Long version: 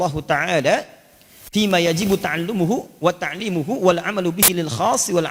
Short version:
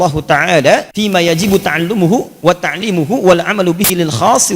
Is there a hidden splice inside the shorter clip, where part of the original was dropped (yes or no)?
yes